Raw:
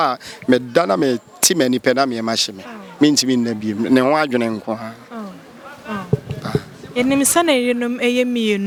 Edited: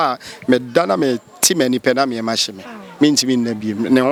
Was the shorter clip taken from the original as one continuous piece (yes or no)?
yes